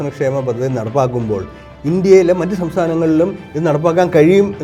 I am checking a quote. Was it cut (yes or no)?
no